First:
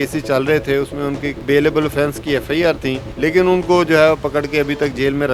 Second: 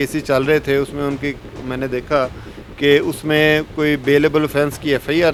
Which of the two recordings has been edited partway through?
first; 2 cuts; at 1.4 s, 3.1 s

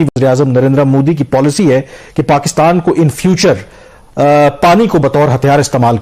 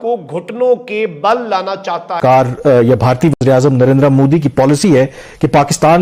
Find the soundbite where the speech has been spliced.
second; 1 cut; at 2.2 s

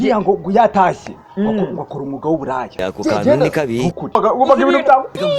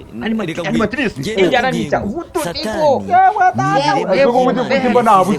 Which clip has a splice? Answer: first; 1 cut; at 4.2 s

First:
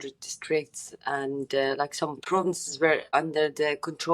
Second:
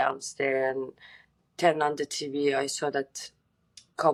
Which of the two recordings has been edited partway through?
first; 2 cuts; at 2.2 s, 3.1 s

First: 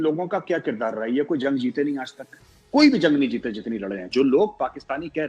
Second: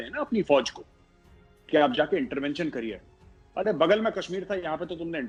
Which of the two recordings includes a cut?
first; 1 cut; at 4.0 s

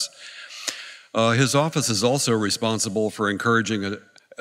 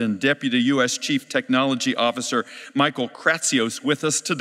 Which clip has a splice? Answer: second; 1 cut; at 1.8 s

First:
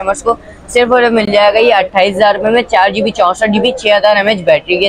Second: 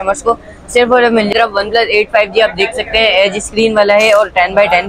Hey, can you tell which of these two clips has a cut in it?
second; 1 cut; at 1.3 s

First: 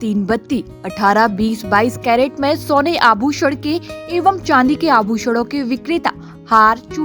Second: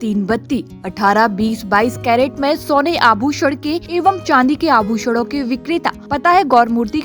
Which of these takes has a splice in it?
second; 2 cuts; at 3.8 s, 6.0 s

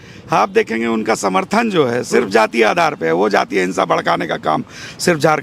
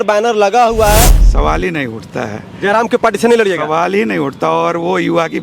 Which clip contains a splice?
second; 1 cut; at 1.2 s

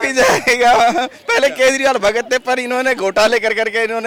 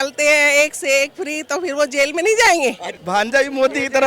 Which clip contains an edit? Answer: second; 1 cut; at 2.9 s

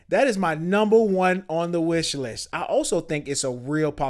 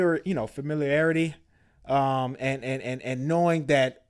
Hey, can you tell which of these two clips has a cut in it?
first; 1 cut; at 2.4 s

